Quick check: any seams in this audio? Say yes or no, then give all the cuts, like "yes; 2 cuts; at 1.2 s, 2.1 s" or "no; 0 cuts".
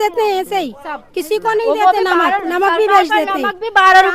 no; 0 cuts